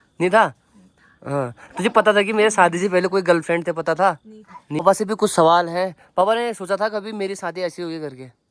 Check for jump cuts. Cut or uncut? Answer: uncut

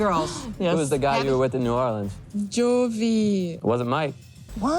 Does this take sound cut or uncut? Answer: cut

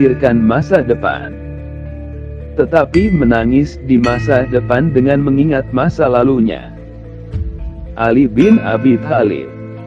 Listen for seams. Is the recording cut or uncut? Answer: cut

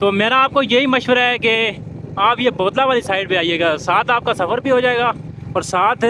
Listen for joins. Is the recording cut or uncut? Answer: uncut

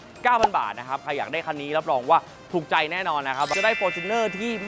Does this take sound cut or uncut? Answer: cut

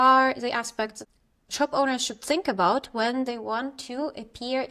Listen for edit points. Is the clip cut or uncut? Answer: cut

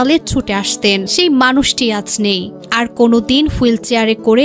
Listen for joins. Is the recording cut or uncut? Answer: cut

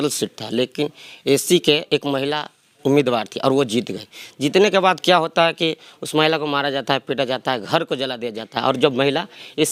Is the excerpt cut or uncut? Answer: uncut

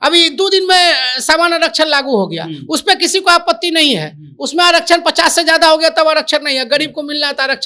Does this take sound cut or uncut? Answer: uncut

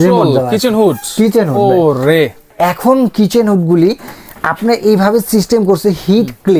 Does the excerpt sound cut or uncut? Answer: cut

